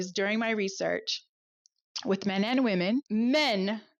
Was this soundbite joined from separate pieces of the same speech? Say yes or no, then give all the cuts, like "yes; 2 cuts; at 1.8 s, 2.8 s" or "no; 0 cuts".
yes; 1 cut; at 3.1 s